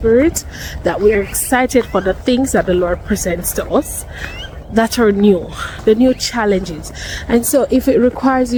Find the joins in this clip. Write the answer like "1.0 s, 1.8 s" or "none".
none

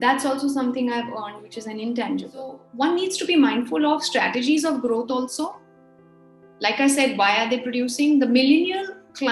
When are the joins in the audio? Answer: 2.6 s

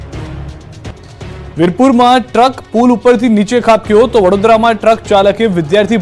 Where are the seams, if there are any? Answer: 0.9 s

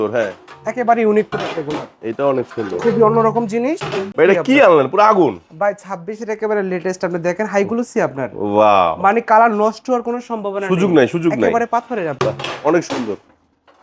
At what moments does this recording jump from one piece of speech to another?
4.1 s, 12.1 s

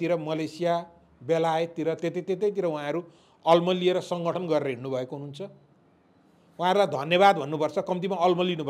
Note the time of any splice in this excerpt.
none

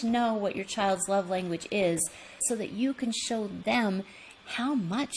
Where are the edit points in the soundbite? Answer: 2.4 s

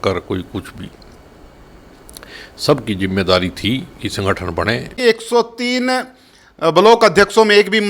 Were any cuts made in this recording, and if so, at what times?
4.9 s

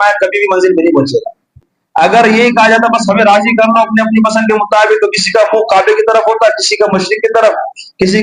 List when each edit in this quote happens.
1.8 s

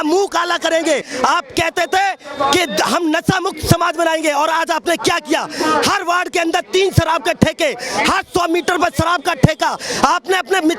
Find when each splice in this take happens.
1.1 s

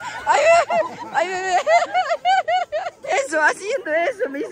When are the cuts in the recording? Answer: 2.9 s

